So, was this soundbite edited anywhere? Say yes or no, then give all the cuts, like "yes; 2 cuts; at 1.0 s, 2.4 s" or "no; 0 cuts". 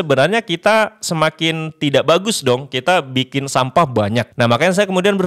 yes; 1 cut; at 4.3 s